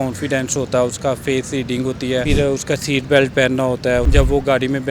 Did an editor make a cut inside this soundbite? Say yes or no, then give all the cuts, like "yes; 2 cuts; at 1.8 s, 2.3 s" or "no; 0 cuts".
yes; 2 cuts; at 2.2 s, 4.1 s